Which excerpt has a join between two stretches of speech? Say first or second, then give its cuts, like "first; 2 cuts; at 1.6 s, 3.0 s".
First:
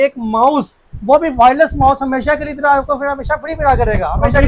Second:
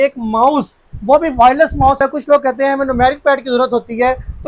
second; 1 cut; at 2.0 s